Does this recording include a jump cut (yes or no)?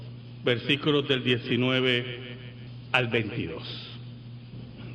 yes